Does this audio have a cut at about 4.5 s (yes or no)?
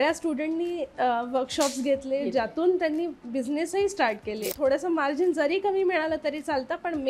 yes